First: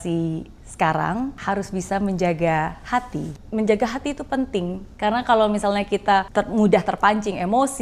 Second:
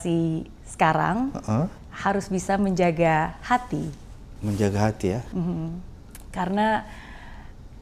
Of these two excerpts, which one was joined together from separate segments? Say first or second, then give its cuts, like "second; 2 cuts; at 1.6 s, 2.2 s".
first; 4 cuts; at 1.4 s, 3.4 s, 4.8 s, 6.3 s